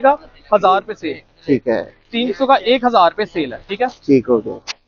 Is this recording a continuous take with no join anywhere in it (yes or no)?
yes